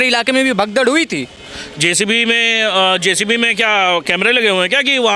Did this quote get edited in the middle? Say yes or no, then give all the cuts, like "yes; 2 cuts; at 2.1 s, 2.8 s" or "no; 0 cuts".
no; 0 cuts